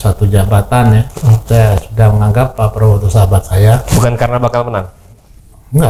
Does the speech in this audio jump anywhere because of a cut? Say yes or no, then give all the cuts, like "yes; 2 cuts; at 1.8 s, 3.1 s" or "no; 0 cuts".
no; 0 cuts